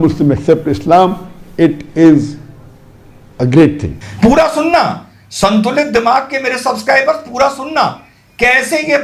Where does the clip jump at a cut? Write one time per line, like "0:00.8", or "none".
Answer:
0:03.9